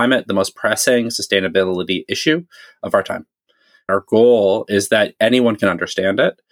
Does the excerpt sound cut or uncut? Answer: cut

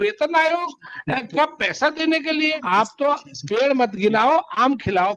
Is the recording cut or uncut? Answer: cut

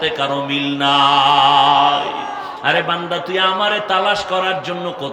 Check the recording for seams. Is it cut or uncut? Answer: cut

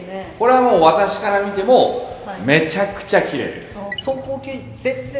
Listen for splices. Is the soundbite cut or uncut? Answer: cut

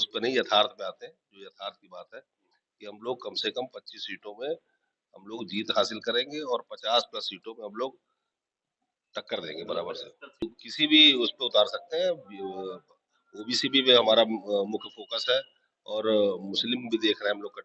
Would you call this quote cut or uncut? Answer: cut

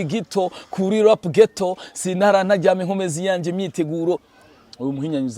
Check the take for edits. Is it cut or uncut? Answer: cut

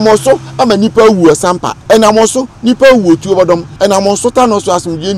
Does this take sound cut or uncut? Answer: cut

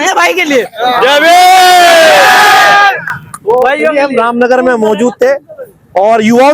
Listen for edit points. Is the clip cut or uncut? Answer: uncut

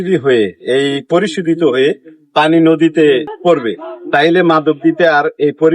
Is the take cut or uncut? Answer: cut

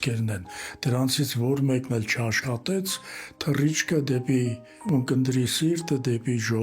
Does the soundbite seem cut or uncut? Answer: cut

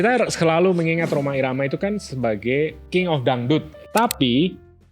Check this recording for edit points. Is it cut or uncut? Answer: cut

